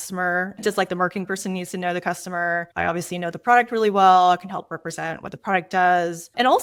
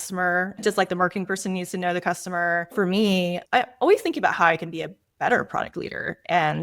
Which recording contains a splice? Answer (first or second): second